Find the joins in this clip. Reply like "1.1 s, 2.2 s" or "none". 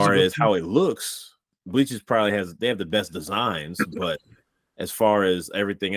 1.5 s

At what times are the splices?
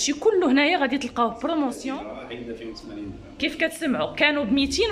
1.8 s

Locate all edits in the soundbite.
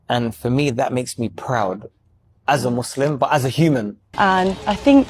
4.1 s

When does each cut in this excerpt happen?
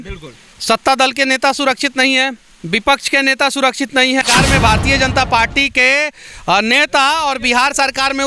4.2 s

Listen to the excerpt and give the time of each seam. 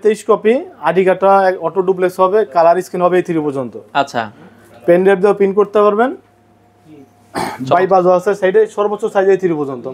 none

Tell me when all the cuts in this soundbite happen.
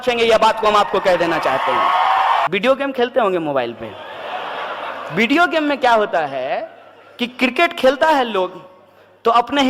2.5 s

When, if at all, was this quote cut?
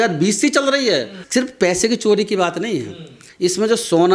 1.2 s

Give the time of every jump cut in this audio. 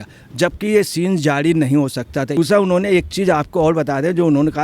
2.4 s

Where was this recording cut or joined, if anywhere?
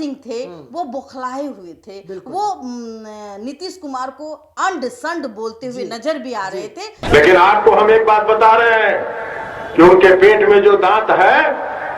6.9 s

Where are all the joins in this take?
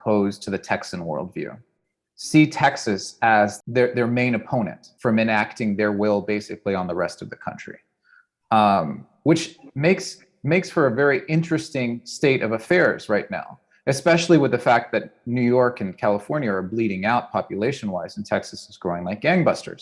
3.6 s, 4.9 s

